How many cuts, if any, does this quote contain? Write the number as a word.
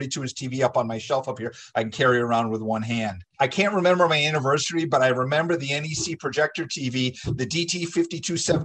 one